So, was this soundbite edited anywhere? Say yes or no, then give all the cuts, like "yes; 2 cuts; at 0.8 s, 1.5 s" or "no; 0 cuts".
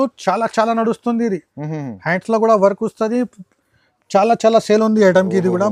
no; 0 cuts